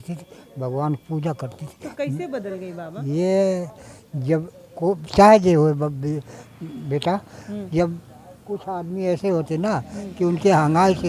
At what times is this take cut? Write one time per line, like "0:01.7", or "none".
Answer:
none